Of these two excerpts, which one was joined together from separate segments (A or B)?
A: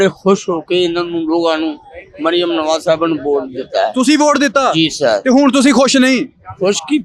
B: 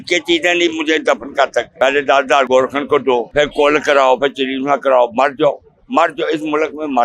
B